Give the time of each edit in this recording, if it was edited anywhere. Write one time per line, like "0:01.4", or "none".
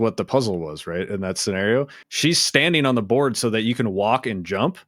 0:02.0